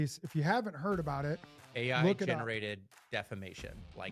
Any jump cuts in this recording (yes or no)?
no